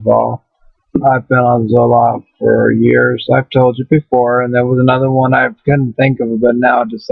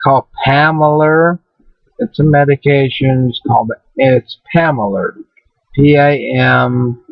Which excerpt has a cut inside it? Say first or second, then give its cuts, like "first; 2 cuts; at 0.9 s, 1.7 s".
first; 1 cut; at 5.0 s